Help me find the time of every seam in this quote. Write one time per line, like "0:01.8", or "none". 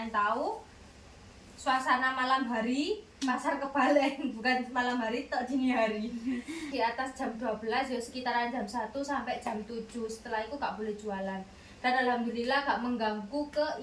0:06.7